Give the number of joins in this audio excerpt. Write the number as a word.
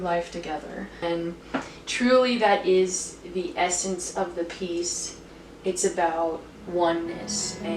one